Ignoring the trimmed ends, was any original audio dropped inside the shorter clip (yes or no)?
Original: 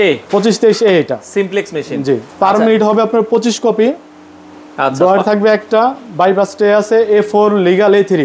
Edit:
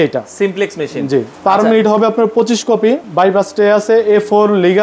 yes